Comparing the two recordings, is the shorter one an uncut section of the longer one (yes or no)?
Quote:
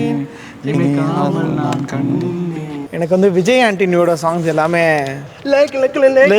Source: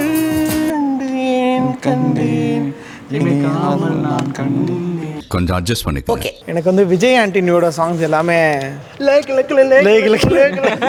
no